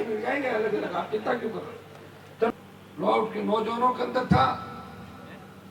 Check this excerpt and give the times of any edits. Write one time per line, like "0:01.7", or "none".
0:02.5